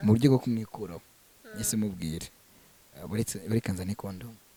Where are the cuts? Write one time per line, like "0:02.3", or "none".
none